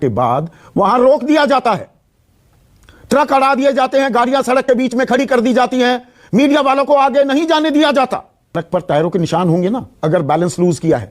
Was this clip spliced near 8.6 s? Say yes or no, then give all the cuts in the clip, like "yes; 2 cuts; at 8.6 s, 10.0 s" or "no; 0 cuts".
yes; 1 cut; at 8.6 s